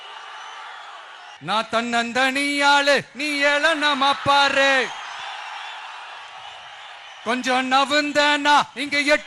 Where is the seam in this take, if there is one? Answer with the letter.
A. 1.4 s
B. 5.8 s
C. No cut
A